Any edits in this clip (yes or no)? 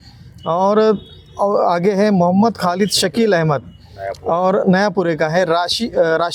no